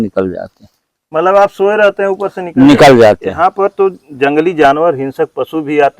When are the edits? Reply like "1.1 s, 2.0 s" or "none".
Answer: 3.3 s